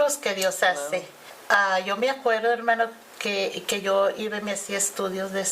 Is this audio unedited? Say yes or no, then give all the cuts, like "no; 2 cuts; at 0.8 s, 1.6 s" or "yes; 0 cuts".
no; 1 cut; at 1.4 s